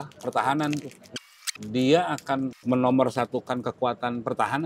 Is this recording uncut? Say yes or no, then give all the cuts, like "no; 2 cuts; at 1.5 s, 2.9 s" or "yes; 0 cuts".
no; 2 cuts; at 1.1 s, 2.6 s